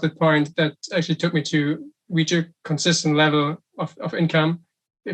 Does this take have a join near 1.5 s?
no; 0 cuts

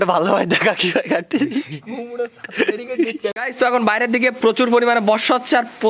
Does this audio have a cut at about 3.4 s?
yes; 1 cut; at 3.4 s

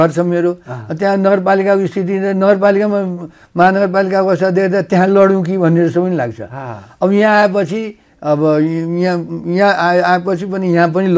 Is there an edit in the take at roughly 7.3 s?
no; 0 cuts

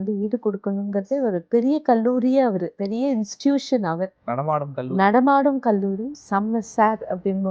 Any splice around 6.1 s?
yes; 3 cuts; at 1.4 s, 2.7 s, 6.1 s

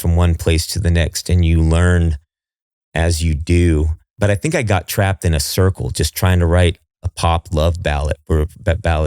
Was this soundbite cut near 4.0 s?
yes; 1 cut; at 4.0 s

